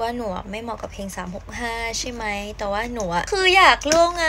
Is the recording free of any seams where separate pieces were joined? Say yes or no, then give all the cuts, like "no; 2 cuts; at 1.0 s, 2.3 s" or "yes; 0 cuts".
no; 1 cut; at 3.3 s